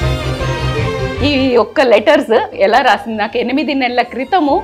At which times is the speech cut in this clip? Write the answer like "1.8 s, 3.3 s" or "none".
0.9 s, 2.5 s